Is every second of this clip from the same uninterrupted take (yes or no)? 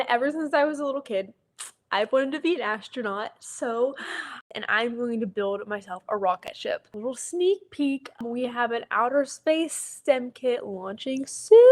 no